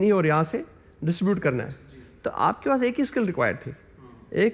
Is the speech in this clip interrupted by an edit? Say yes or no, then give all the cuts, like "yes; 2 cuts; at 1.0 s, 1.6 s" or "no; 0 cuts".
no; 0 cuts